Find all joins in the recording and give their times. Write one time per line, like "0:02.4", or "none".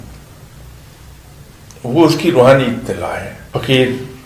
0:03.3